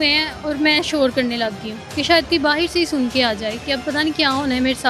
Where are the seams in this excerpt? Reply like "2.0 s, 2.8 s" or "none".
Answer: none